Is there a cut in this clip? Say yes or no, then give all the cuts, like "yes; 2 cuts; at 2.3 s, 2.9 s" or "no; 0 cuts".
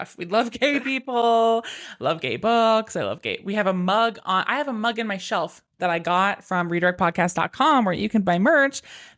no; 0 cuts